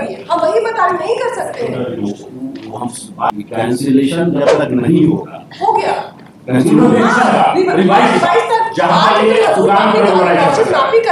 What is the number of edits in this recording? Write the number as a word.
one